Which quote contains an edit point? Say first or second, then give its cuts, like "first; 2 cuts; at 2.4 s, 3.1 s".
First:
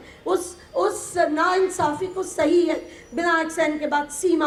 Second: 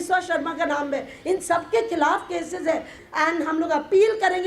second; 1 cut; at 3.0 s